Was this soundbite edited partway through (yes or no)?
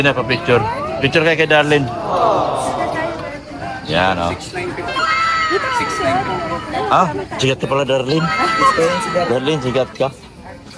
yes